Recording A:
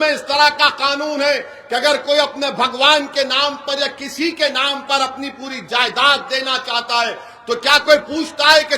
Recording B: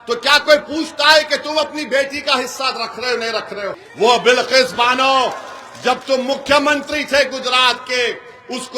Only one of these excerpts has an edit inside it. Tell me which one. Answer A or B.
B